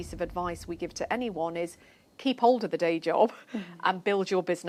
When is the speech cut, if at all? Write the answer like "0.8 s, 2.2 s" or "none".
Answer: none